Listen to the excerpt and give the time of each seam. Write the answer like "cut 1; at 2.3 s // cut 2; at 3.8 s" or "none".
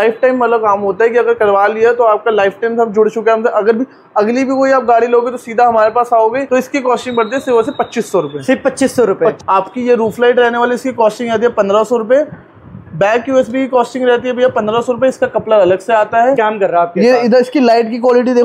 cut 1; at 6.4 s // cut 2; at 9.4 s // cut 3; at 16.4 s